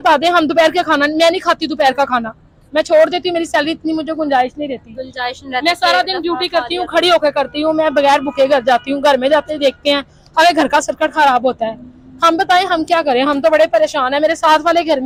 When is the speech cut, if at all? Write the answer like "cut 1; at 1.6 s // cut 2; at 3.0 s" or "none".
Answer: none